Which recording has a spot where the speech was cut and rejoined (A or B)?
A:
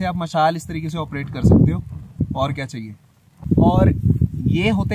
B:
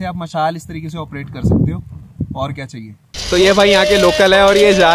B